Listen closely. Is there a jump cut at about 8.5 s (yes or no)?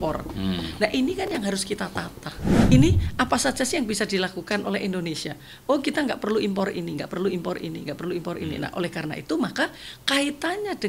no